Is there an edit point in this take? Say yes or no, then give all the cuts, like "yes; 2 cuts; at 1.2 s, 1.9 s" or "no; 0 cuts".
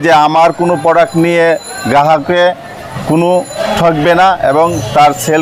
no; 0 cuts